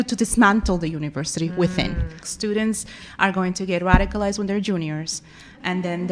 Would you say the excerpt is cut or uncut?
cut